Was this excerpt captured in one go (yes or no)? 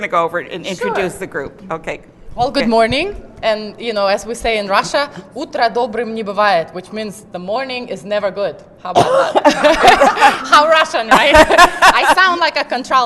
yes